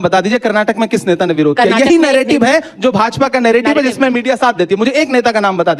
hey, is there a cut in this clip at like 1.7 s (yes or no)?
no